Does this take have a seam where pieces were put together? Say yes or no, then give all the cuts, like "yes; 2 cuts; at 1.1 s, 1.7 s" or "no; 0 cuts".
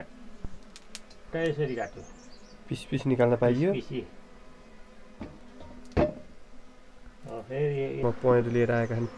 yes; 1 cut; at 8.0 s